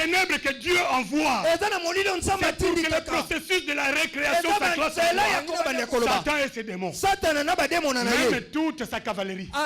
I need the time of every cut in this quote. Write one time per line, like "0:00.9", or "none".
0:05.6